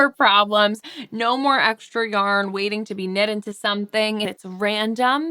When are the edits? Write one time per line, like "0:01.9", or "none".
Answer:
0:04.3